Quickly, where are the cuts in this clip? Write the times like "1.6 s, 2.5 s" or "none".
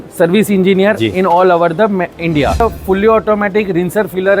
2.6 s